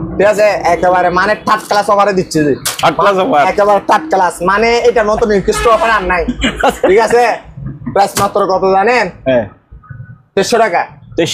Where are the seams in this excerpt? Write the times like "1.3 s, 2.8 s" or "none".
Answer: none